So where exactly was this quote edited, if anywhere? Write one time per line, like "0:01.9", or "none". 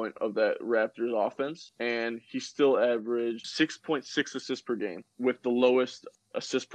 none